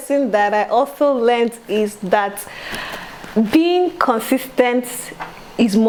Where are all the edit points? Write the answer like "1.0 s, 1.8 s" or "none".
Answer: none